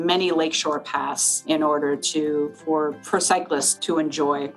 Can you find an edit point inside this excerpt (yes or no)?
yes